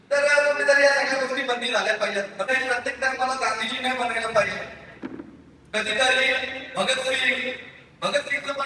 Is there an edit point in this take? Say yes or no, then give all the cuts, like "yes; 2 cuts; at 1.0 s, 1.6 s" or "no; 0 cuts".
yes; 1 cut; at 2.5 s